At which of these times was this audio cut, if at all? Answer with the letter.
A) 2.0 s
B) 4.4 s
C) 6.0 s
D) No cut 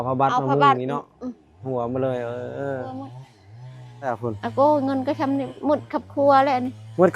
B